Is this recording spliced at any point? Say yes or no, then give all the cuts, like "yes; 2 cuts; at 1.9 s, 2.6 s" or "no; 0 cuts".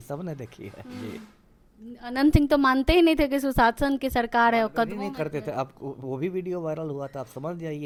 no; 0 cuts